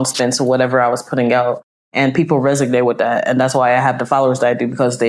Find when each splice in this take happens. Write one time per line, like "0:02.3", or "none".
none